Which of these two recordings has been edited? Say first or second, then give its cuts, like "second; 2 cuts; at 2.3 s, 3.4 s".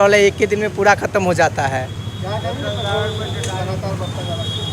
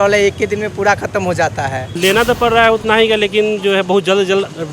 second; 1 cut; at 1.8 s